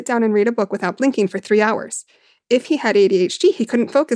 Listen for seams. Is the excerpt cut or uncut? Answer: uncut